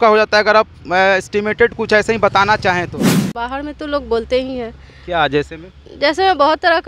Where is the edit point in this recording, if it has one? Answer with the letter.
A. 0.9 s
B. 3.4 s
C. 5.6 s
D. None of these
B